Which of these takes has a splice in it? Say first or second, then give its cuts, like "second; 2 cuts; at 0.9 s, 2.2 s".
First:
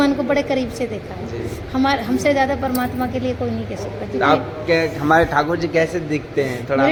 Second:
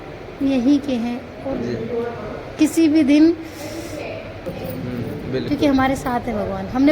second; 1 cut; at 4.5 s